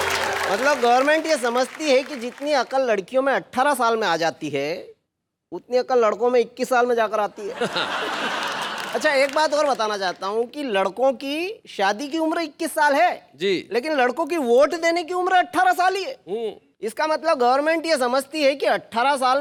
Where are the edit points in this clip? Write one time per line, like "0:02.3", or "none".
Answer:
none